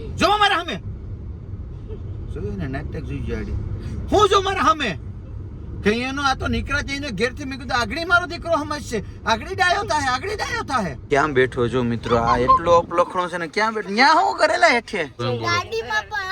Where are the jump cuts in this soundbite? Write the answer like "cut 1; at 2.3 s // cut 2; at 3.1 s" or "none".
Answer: cut 1; at 11.0 s // cut 2; at 15.1 s